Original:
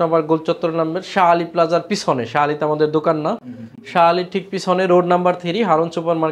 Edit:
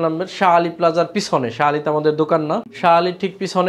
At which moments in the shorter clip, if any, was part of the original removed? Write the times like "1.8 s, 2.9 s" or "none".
2.7 s